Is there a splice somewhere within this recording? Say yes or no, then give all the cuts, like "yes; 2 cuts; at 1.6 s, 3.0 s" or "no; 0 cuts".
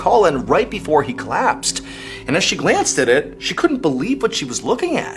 no; 0 cuts